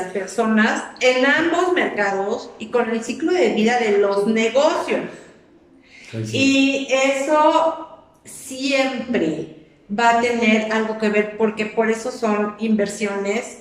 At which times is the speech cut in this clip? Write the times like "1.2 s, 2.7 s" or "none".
none